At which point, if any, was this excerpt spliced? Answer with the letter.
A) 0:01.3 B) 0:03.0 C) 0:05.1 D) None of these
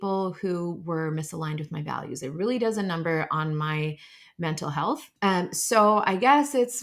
C